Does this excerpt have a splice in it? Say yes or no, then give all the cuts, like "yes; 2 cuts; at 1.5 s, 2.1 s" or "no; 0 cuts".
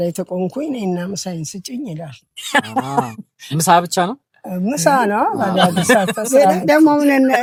no; 0 cuts